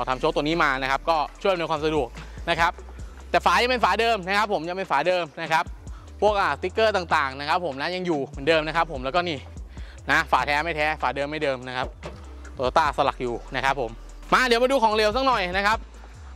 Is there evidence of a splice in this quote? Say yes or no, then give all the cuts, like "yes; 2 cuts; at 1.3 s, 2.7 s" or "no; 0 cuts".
yes; 1 cut; at 14.1 s